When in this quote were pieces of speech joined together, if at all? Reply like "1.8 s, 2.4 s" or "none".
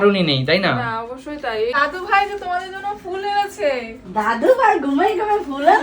1.7 s